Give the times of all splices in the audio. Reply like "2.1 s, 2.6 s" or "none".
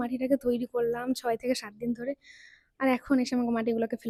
none